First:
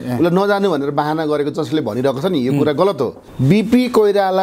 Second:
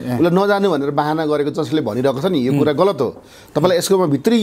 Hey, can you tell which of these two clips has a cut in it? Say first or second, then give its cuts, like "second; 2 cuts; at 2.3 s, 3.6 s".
first; 1 cut; at 3.2 s